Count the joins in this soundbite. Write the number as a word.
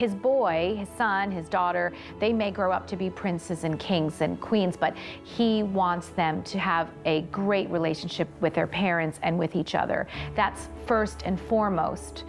one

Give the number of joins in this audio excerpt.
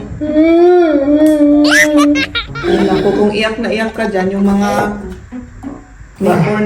one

